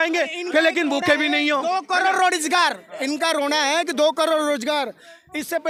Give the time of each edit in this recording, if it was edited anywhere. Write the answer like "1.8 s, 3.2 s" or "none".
none